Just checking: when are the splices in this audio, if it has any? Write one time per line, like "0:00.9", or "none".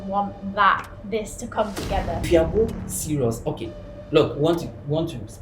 0:02.3